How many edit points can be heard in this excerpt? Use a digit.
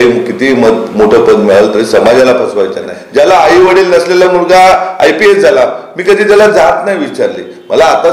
1